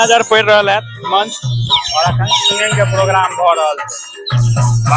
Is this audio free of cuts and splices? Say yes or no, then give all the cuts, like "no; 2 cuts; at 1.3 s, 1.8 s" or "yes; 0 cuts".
yes; 0 cuts